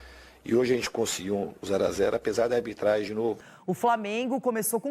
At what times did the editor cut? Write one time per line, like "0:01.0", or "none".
0:03.4